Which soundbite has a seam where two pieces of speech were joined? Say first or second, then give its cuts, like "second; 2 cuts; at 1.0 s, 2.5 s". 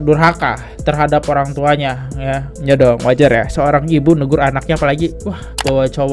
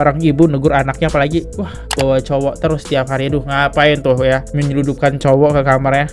first; 1 cut; at 2.5 s